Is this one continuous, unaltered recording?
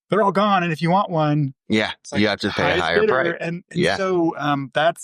yes; 0 cuts

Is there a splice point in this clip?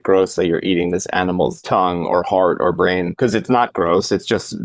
yes; 2 cuts; at 1.6 s, 3.1 s

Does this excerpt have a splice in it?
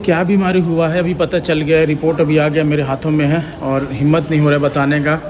no; 0 cuts

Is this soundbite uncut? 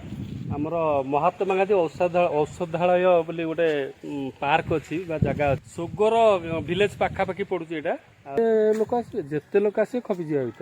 no; 2 cuts; at 5.6 s, 8.4 s

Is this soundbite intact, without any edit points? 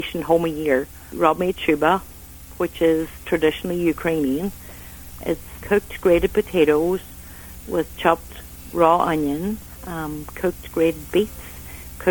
no; 2 cuts; at 1.1 s, 5.5 s

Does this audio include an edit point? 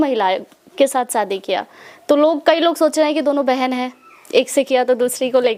no; 0 cuts

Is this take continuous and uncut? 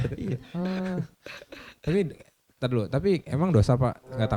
yes; 0 cuts

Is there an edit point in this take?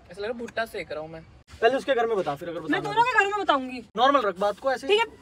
yes; 2 cuts; at 1.0 s, 3.9 s

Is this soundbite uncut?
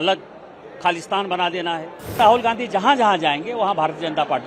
no; 1 cut; at 2.2 s

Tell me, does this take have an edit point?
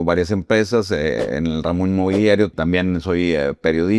yes; 1 cut; at 2.5 s

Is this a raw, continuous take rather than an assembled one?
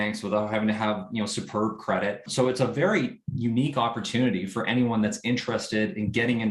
no; 1 cut; at 2.3 s

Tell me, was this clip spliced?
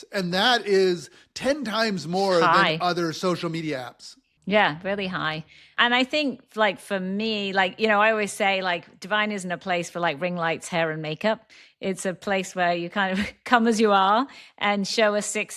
no; 0 cuts

